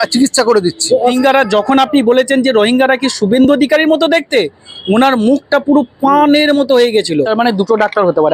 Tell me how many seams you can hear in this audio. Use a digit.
2